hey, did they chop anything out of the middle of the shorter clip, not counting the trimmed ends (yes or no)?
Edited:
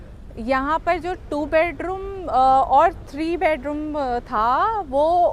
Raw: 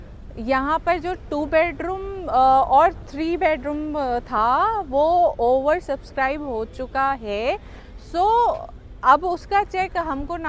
no